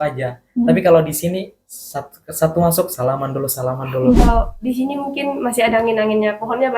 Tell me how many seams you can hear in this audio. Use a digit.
1